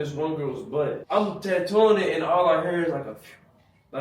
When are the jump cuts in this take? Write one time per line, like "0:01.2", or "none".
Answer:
0:01.0